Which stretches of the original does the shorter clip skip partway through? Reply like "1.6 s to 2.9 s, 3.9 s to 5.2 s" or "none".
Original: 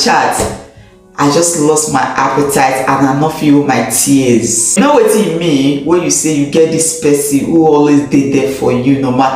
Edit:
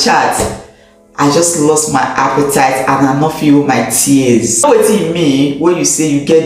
4.6 s to 4.9 s